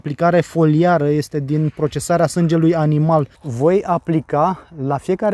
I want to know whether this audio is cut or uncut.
cut